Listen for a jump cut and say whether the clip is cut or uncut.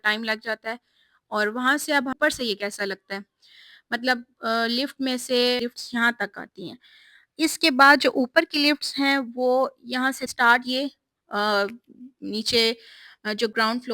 cut